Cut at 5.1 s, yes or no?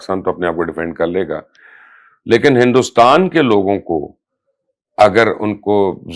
no